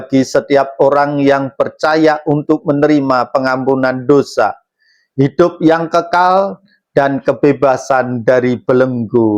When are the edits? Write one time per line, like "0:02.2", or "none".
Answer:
none